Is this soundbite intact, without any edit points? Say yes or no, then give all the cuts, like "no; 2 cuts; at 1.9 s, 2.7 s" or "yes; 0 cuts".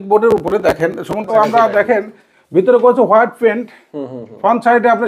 no; 1 cut; at 1.2 s